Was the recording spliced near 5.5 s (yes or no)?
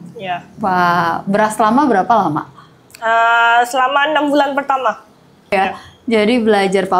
yes